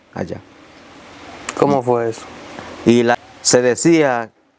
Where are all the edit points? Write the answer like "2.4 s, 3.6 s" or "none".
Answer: 3.2 s